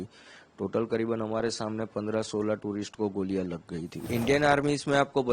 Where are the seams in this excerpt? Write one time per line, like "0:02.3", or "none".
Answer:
0:04.0